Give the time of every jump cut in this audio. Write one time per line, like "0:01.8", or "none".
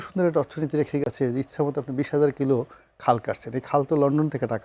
none